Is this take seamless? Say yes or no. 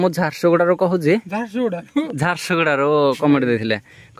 yes